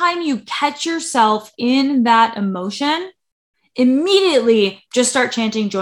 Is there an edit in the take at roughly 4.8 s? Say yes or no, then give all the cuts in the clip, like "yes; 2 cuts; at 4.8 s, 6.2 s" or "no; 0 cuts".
yes; 1 cut; at 4.8 s